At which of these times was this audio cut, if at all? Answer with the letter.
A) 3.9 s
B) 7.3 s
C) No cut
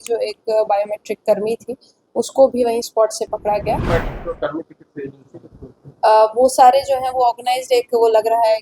A